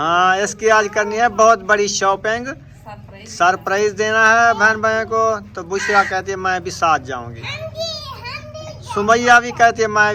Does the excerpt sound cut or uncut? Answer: uncut